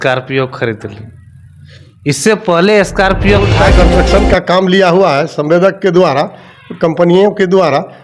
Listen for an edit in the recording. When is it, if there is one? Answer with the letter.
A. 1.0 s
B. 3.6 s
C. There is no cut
B